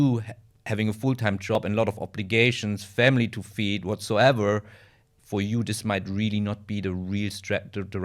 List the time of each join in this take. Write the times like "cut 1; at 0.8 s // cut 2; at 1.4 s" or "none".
cut 1; at 1.6 s